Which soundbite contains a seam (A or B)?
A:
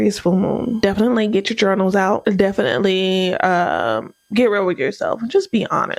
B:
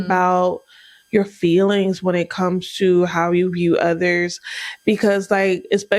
A